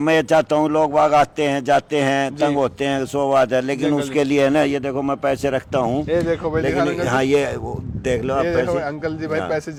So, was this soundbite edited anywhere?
no; 0 cuts

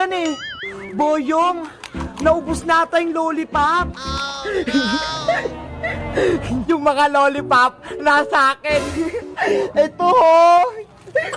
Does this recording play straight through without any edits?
no; 1 cut; at 6.6 s

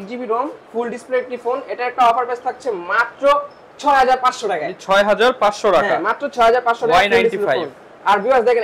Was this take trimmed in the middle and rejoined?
no; 0 cuts

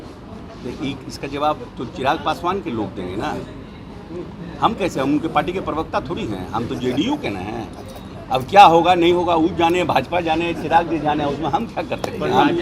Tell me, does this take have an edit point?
no; 0 cuts

